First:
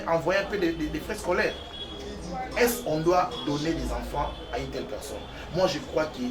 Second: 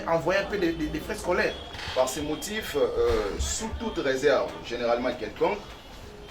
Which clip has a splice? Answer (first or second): second